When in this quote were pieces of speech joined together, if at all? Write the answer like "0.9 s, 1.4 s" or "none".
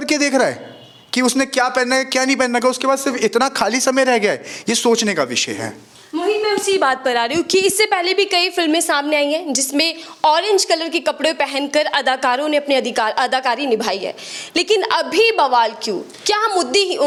none